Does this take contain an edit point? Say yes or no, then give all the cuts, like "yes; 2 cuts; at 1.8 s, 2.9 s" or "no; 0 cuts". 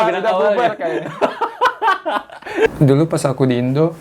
yes; 1 cut; at 2.7 s